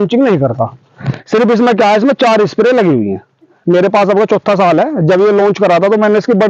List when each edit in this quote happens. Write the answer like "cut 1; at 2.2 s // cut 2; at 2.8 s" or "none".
cut 1; at 3.5 s